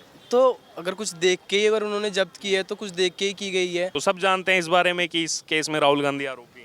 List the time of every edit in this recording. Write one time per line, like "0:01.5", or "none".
0:04.0